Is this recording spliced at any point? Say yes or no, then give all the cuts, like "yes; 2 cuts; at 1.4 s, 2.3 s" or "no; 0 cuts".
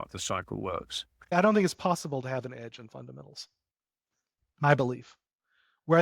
yes; 1 cut; at 1.3 s